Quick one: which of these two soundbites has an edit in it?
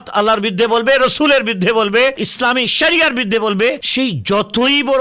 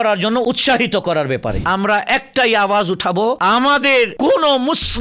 second; 1 cut; at 1.6 s

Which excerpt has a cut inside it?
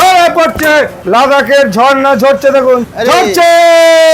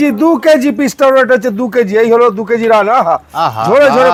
first; 2 cuts; at 1.0 s, 2.9 s

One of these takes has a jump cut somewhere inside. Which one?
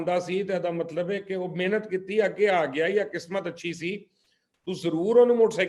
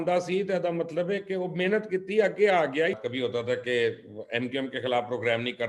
second; 1 cut; at 2.9 s

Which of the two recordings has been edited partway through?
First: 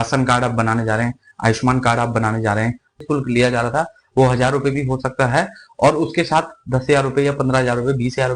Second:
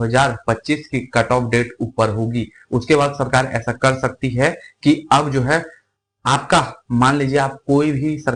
first; 1 cut; at 3.0 s

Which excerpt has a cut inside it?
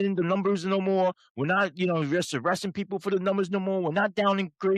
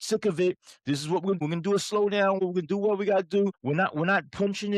second; 3 cuts; at 1.4 s, 2.4 s, 3.6 s

